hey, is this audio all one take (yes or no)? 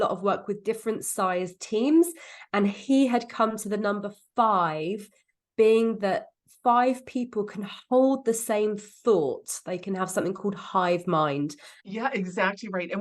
no